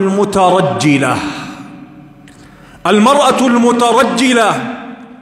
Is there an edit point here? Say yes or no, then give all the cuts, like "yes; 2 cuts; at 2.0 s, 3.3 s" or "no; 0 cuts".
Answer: no; 0 cuts